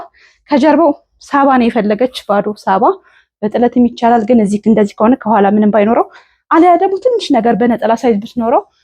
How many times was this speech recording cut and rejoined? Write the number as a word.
zero